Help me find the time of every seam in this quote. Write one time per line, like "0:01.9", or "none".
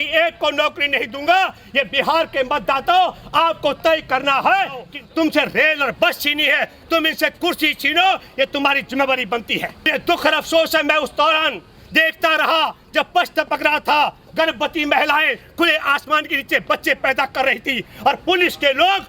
0:04.9
0:09.9